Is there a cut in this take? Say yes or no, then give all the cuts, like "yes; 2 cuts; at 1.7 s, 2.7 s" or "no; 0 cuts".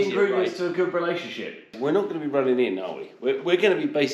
yes; 1 cut; at 1.7 s